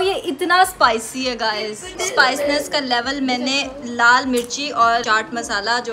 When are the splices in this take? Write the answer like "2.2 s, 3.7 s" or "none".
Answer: 1.9 s, 5.0 s

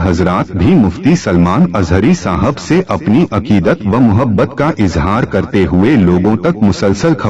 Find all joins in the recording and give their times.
none

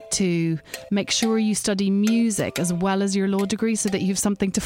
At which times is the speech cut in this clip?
none

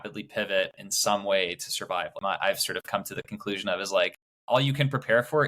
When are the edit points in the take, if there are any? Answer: 2.2 s, 4.3 s

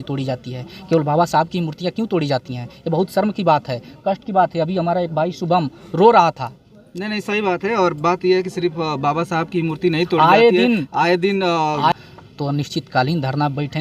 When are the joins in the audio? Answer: 11.9 s

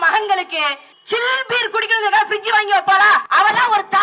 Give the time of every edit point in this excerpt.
0.9 s, 3.3 s

